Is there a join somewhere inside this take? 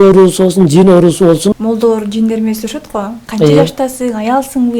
yes; 1 cut; at 1.6 s

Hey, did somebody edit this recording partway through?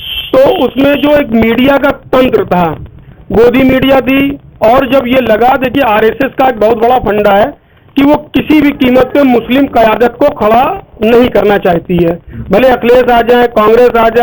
no; 0 cuts

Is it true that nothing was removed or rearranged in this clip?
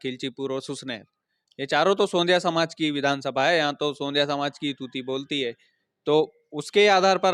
yes; 0 cuts

